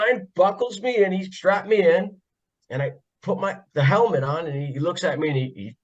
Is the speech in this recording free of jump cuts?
no; 1 cut; at 1.3 s

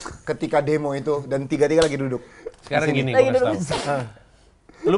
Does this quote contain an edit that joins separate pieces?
no; 0 cuts

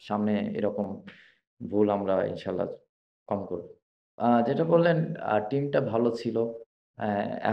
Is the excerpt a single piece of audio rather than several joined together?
yes; 0 cuts

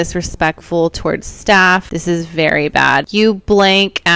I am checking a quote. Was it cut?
yes; 2 cuts; at 1.9 s, 3.1 s

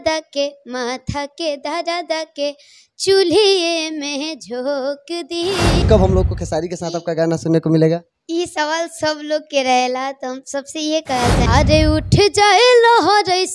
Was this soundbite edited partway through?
yes; 2 cuts; at 5.8 s, 11.5 s

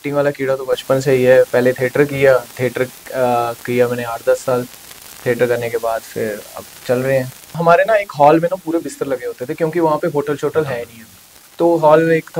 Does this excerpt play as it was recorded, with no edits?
no; 1 cut; at 7.5 s

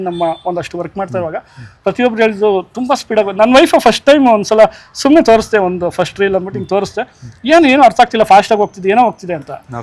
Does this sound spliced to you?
no; 0 cuts

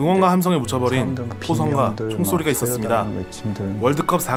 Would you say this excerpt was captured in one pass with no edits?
yes; 0 cuts

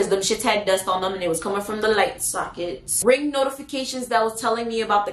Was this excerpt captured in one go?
no; 1 cut; at 2.9 s

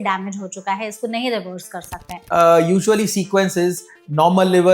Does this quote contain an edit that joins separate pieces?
yes; 1 cut; at 2.1 s

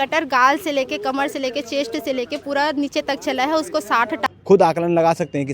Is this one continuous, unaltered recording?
no; 1 cut; at 4.2 s

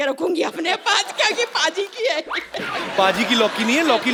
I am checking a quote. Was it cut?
no; 0 cuts

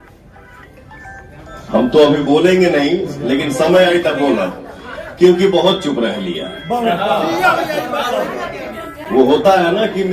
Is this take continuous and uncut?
yes; 0 cuts

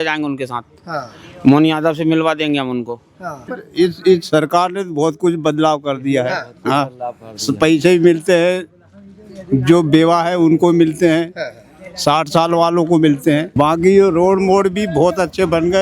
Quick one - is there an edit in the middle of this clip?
yes; 1 cut; at 3.6 s

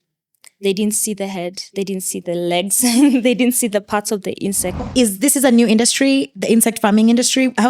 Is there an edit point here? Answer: yes; 1 cut; at 4.9 s

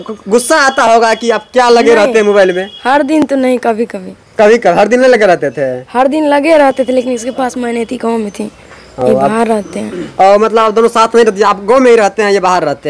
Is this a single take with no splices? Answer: yes; 0 cuts

